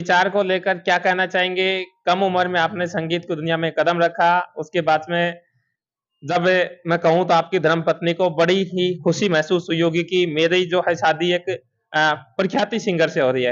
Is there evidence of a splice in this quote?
no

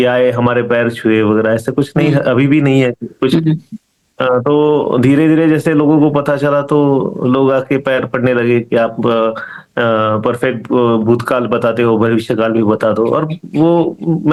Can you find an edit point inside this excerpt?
no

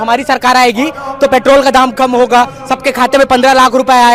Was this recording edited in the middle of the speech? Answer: no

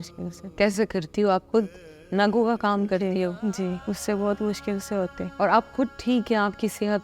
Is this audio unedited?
no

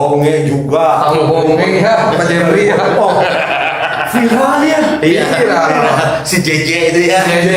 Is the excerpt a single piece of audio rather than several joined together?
yes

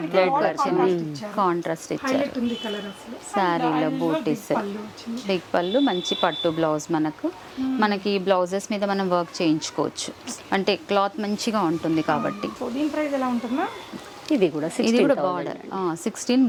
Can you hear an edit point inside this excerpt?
no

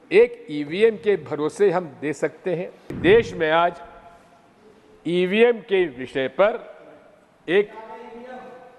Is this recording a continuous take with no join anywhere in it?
no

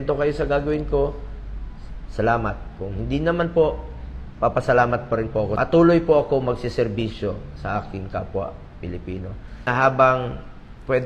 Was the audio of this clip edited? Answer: yes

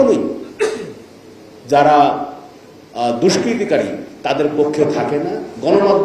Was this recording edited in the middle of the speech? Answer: no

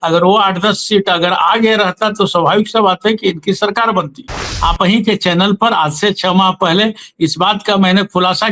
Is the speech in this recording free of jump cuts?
no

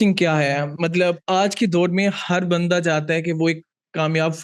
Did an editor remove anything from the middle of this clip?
no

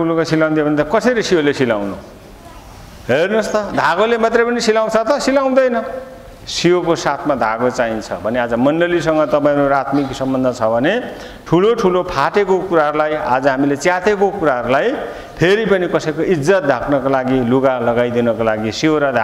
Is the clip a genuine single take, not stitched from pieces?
yes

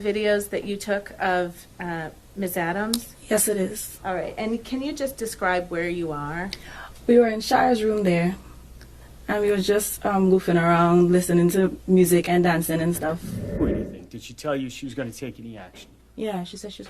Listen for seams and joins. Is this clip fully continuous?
no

